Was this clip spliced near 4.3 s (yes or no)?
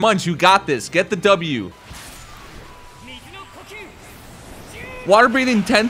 no